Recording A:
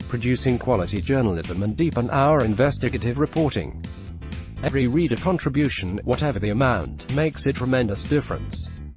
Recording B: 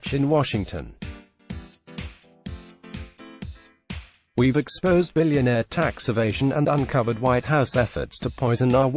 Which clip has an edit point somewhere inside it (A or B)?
B